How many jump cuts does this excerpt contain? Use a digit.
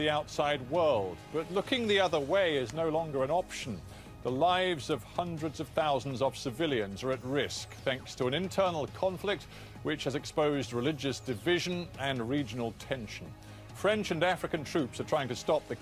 1